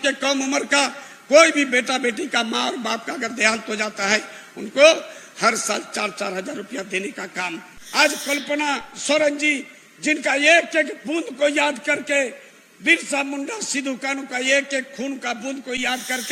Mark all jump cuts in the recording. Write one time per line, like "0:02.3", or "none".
0:07.8